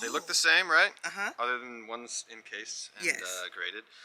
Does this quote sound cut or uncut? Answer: uncut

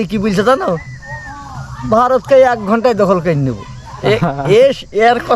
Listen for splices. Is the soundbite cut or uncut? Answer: uncut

